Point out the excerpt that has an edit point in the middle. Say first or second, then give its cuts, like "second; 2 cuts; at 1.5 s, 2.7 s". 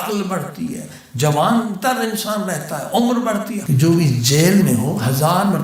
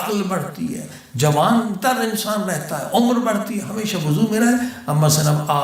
first; 1 cut; at 3.6 s